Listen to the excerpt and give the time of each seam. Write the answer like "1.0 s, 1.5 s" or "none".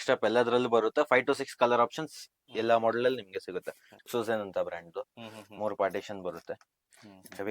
3.9 s